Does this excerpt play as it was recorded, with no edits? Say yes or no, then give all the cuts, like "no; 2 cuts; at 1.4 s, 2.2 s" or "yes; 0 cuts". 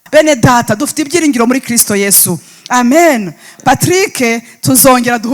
yes; 0 cuts